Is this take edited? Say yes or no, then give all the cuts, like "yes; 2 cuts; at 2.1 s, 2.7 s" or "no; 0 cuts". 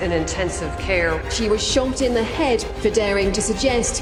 no; 0 cuts